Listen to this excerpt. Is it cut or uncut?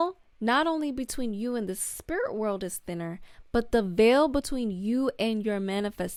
uncut